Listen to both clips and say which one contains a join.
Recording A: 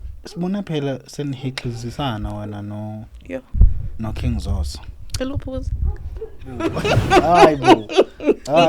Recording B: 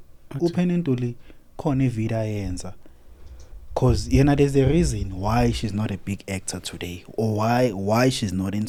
A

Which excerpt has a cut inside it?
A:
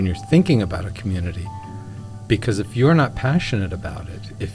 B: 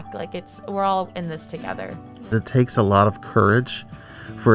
B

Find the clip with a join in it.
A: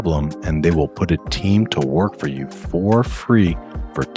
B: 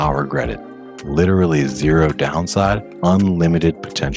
B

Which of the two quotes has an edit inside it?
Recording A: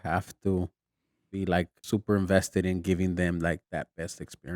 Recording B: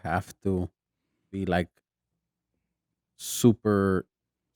A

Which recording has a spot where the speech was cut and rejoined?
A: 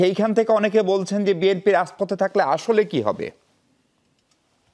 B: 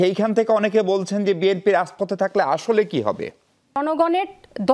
B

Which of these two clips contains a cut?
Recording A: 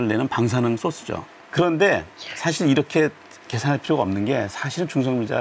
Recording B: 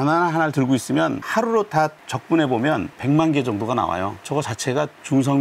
A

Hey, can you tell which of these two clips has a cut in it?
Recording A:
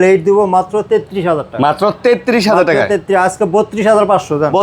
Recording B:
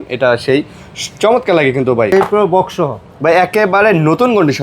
B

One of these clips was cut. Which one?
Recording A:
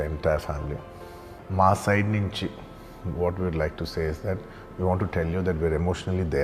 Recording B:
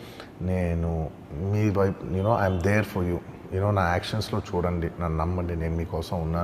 A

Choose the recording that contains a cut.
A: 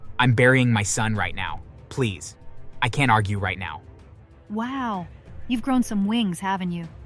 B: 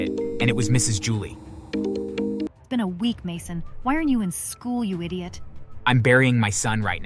B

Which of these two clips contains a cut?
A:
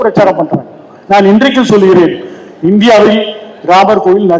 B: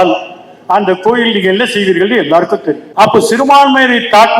B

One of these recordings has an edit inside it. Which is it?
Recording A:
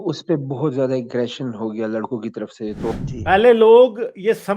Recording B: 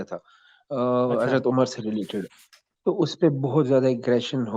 A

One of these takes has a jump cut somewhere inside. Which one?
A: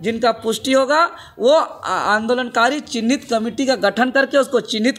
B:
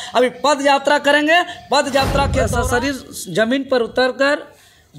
B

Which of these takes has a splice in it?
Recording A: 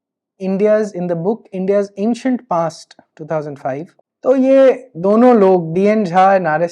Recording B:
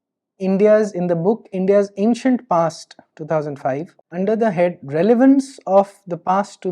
A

